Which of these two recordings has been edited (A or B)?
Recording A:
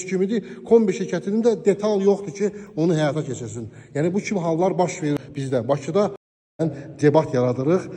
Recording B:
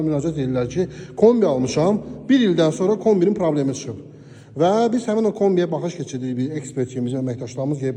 A